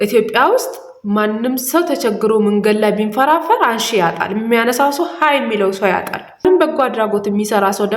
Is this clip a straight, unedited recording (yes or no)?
no